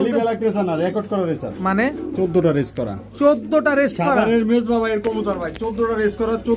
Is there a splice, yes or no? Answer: no